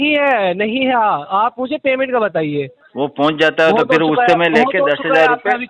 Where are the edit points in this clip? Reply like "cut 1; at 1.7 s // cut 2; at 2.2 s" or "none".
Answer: cut 1; at 2.8 s